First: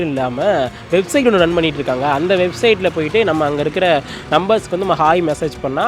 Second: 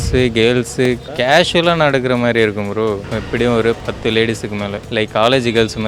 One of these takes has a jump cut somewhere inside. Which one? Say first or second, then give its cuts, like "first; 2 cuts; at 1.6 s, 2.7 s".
second; 4 cuts; at 1.0 s, 3.0 s, 3.8 s, 4.8 s